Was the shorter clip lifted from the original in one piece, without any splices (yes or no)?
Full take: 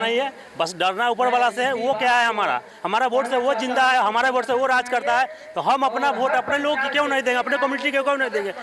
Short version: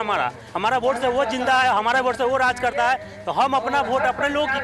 yes